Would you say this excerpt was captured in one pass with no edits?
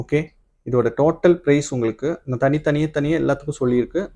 yes; 0 cuts

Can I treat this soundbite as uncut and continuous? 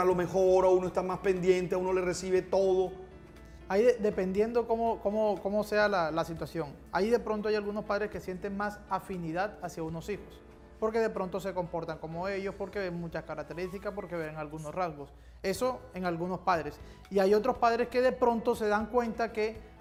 yes; 0 cuts

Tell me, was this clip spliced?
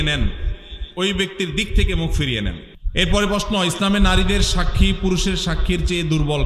yes; 1 cut; at 2.7 s

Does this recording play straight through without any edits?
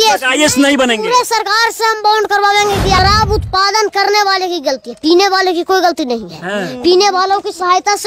no; 1 cut; at 3.0 s

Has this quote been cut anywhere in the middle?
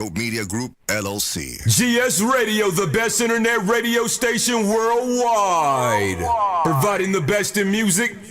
yes; 1 cut; at 1.6 s

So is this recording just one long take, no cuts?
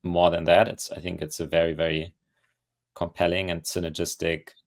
yes; 0 cuts

